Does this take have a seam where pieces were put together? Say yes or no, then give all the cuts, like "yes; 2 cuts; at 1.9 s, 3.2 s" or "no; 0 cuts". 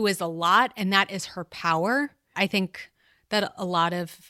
yes; 1 cut; at 2.3 s